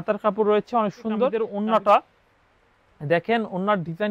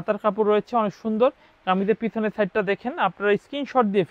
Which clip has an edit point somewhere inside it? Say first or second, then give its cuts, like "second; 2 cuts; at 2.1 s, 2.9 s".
first; 1 cut; at 1.4 s